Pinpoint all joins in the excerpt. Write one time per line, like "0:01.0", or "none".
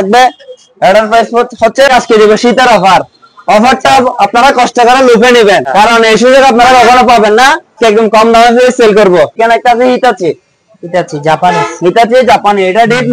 0:01.9
0:05.7
0:07.8
0:09.4